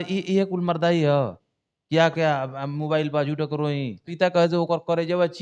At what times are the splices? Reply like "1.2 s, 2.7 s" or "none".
4.0 s